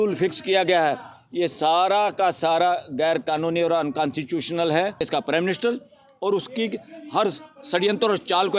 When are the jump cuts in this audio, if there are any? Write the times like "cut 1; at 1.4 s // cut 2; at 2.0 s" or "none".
cut 1; at 5.0 s